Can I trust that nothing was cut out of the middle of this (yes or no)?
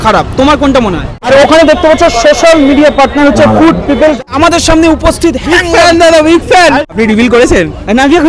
no